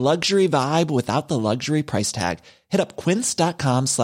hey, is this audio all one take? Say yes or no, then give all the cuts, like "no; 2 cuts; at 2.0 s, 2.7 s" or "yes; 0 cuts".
yes; 0 cuts